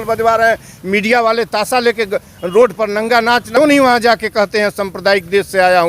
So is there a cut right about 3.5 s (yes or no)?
yes